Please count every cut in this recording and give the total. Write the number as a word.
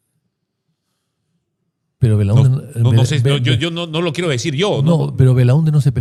zero